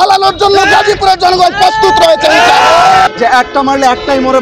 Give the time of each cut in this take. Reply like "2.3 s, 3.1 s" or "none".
3.1 s